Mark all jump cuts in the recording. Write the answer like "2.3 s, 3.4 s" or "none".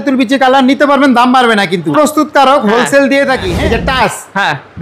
1.9 s, 3.5 s